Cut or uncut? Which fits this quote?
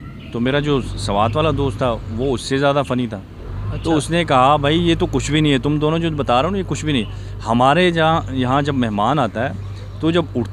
uncut